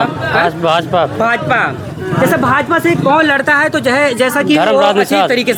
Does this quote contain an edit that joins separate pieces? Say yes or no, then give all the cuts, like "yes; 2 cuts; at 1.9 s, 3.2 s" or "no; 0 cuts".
no; 0 cuts